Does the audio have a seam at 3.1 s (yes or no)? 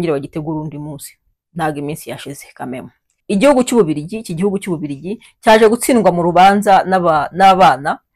yes